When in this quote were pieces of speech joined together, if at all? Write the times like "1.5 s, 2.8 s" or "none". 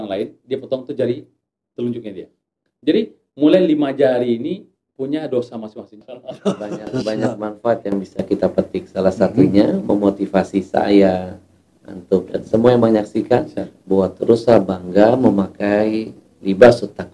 5.9 s